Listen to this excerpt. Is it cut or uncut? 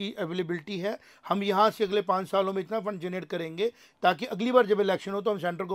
uncut